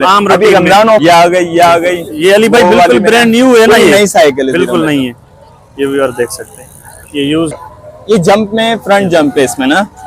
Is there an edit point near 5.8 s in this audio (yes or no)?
no